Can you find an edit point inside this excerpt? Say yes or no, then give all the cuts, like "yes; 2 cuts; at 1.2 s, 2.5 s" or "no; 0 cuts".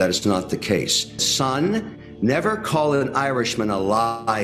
yes; 1 cut; at 1.3 s